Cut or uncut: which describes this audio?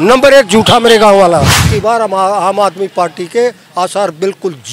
cut